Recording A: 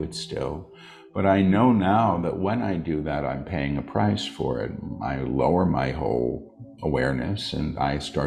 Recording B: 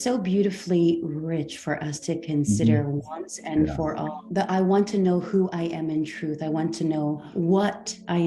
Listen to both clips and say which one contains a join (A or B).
B